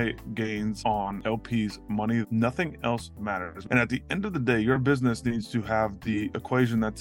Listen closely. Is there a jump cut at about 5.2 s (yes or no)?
no